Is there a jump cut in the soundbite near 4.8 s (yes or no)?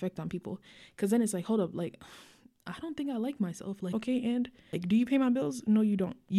yes